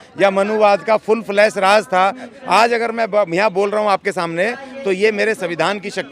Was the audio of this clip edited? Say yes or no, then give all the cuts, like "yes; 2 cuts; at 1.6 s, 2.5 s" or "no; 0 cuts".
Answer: yes; 1 cut; at 2.3 s